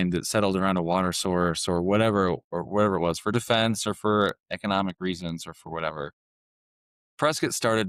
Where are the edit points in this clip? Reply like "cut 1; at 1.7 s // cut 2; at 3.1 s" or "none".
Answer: none